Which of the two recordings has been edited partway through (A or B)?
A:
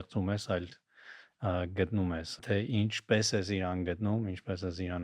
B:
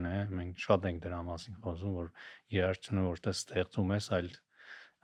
A